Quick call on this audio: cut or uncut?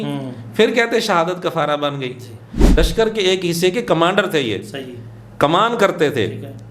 cut